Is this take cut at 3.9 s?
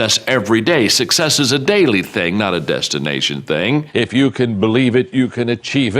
yes; 1 cut; at 3.9 s

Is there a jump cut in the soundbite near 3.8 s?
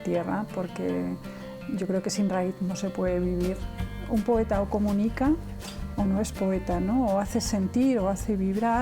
yes; 1 cut; at 3.8 s

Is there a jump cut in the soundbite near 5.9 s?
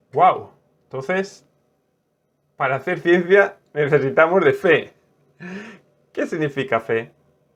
no; 0 cuts

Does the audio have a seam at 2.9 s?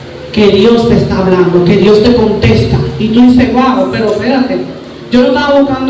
no; 0 cuts

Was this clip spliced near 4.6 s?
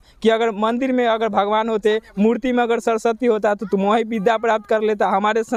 no; 0 cuts

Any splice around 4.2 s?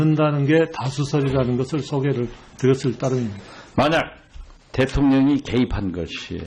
yes; 1 cut; at 4.2 s

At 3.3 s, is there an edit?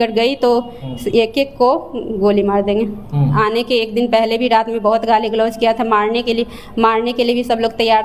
yes; 1 cut; at 3.3 s

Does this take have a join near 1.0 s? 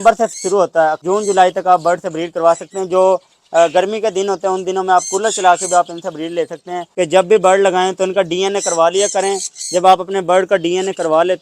yes; 2 cuts; at 1.0 s, 6.8 s

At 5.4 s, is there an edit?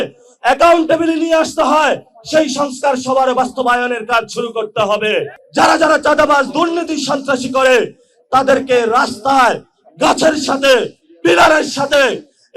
yes; 1 cut; at 5.4 s

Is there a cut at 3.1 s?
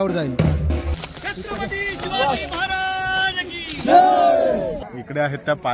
no; 2 cuts; at 1.0 s, 4.7 s

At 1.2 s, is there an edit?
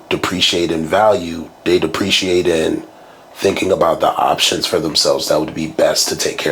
no; 0 cuts

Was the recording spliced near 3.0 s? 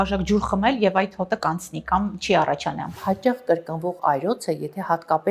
yes; 1 cut; at 3.0 s

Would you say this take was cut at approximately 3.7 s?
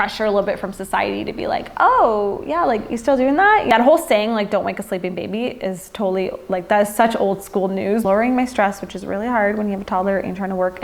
yes; 2 cuts; at 3.7 s, 8.0 s

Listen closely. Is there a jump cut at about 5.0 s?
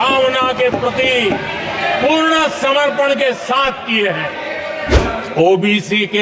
yes; 1 cut; at 5.0 s

